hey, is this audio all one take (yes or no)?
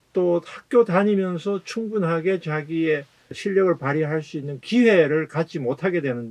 no